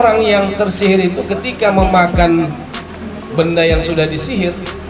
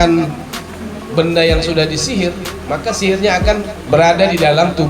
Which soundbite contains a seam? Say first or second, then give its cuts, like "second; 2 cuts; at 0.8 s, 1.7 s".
second; 1 cut; at 3.8 s